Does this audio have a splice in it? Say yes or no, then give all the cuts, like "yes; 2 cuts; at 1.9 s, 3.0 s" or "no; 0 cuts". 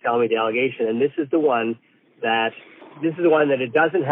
yes; 1 cut; at 2.9 s